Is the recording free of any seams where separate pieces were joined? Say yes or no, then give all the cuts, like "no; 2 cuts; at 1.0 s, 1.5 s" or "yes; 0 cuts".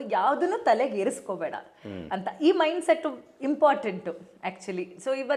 yes; 0 cuts